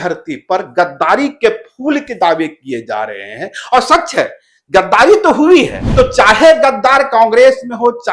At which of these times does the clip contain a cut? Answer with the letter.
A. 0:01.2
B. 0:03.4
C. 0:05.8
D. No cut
C